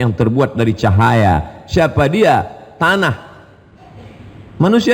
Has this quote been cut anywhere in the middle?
no; 0 cuts

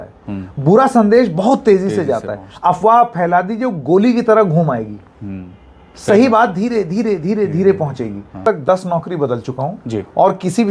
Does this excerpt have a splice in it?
yes; 1 cut; at 8.4 s

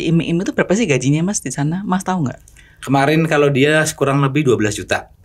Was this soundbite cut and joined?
no; 0 cuts

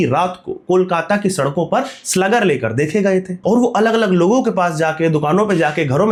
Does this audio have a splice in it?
no; 0 cuts

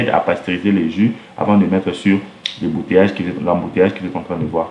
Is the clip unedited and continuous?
yes; 0 cuts

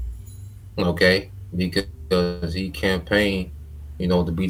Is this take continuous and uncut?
yes; 0 cuts

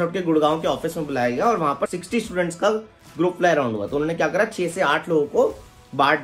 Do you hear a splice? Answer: yes; 1 cut; at 1.9 s

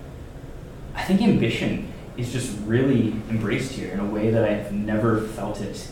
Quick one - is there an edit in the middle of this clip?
no; 0 cuts

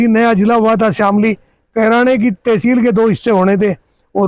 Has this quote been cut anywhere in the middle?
no; 0 cuts

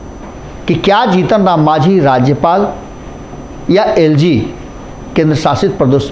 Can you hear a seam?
no; 0 cuts

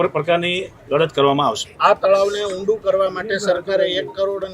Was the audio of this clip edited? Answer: yes; 1 cut; at 1.7 s

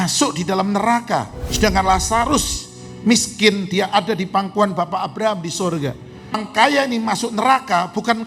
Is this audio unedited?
no; 2 cuts; at 1.4 s, 6.4 s

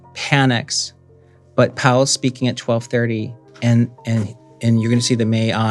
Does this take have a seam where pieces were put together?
no; 0 cuts

